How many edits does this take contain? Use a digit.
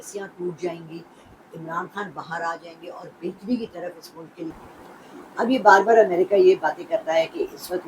1